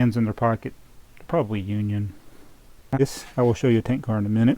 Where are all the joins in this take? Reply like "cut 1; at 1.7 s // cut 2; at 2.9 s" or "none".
cut 1; at 3.0 s